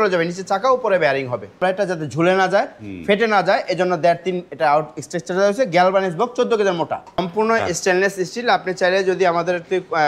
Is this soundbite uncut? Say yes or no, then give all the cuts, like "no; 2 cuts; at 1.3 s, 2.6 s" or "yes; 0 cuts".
no; 2 cuts; at 1.6 s, 7.2 s